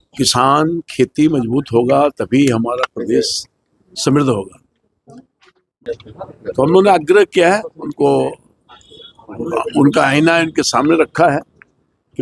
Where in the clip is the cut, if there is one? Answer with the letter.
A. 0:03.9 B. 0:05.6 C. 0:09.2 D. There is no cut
B